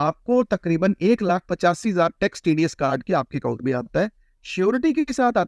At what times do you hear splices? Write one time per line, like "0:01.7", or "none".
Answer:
none